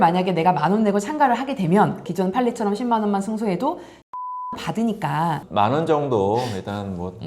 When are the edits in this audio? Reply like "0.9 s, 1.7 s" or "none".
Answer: 2.1 s, 5.4 s